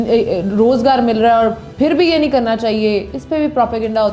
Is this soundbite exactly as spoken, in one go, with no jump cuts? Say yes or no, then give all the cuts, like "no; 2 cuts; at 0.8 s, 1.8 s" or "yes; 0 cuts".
yes; 0 cuts